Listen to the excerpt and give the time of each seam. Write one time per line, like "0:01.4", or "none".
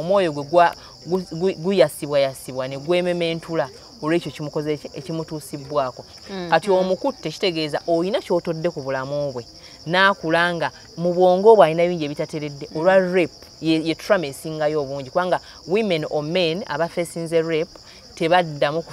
0:06.1